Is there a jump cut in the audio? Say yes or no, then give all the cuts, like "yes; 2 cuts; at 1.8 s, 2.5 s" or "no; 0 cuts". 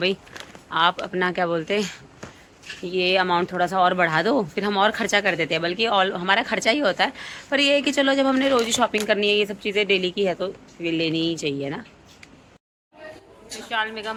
no; 0 cuts